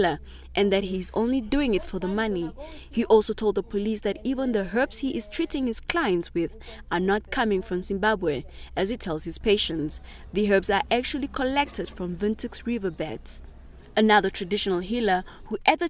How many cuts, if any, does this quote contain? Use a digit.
0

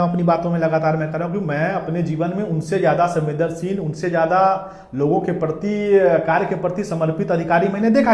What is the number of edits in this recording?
0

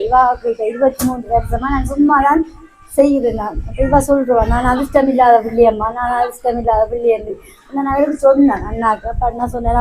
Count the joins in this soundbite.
0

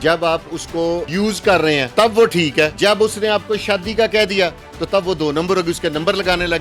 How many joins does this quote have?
3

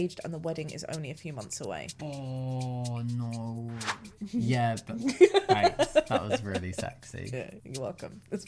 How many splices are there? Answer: 1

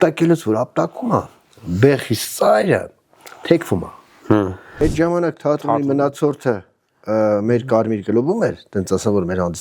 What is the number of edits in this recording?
1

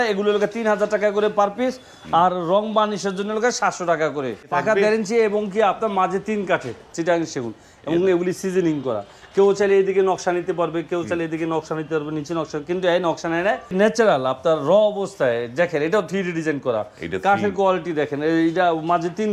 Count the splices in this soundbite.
3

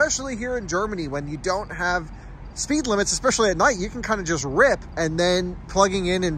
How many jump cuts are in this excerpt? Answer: 1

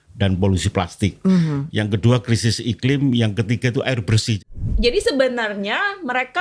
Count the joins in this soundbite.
1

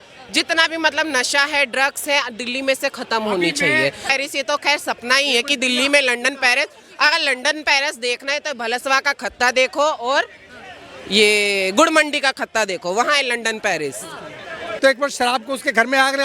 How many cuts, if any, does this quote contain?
2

